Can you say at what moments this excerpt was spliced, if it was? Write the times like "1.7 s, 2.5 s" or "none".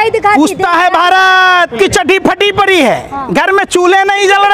1.7 s

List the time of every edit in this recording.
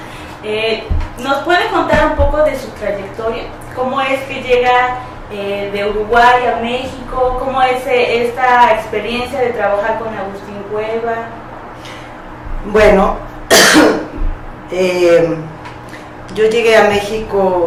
none

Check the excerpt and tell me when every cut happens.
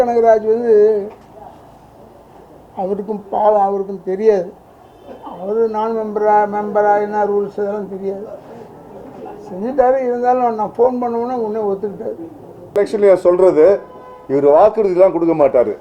12.8 s

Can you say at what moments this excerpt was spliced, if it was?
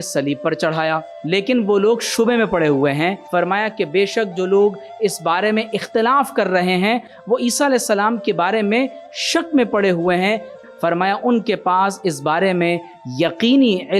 1.1 s, 3.2 s, 10.6 s

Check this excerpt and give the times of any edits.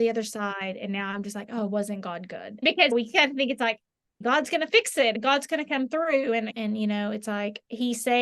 2.6 s, 4.2 s, 5.2 s, 6.5 s

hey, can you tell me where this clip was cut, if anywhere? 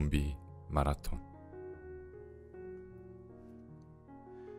1.2 s

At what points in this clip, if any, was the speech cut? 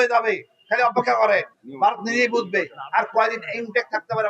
1.6 s

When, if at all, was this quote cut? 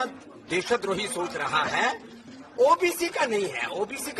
2.2 s

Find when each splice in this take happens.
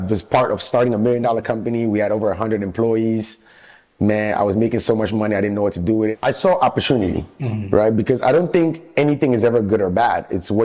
6.1 s

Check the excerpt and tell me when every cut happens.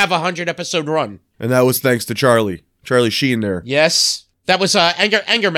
1.3 s, 4.3 s

